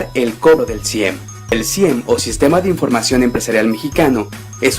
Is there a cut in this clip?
yes; 1 cut; at 3.5 s

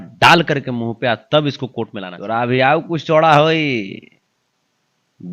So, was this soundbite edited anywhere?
yes; 1 cut; at 2.1 s

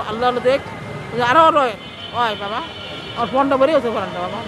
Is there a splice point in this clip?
no; 0 cuts

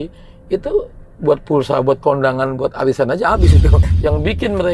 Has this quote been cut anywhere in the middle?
yes; 1 cut; at 3.8 s

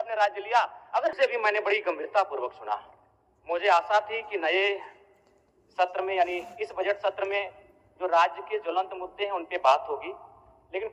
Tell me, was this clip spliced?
yes; 1 cut; at 1.1 s

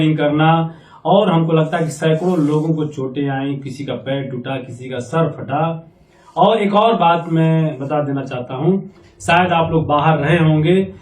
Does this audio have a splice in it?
no; 0 cuts

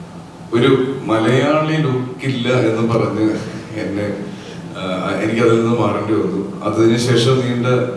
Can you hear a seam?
no; 0 cuts

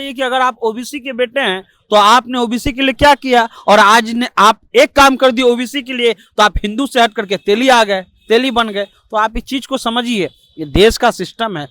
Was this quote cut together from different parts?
no; 0 cuts

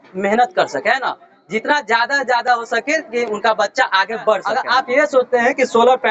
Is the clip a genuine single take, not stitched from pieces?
no; 1 cut; at 4.5 s

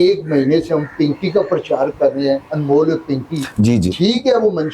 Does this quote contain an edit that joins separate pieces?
no; 0 cuts

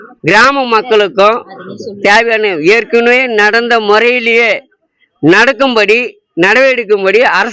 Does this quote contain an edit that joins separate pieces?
no; 0 cuts

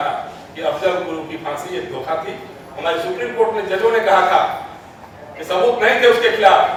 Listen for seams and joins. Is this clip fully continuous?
yes; 0 cuts

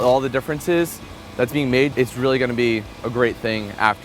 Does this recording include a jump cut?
yes; 1 cut; at 1.9 s

